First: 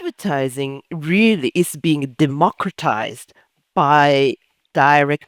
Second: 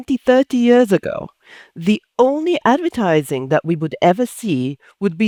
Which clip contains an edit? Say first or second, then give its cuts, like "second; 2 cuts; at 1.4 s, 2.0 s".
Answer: first; 1 cut; at 1.5 s